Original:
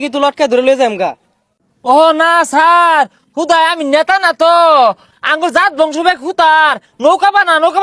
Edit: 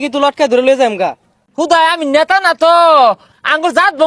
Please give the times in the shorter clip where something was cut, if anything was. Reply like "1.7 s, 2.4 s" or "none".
1.5 s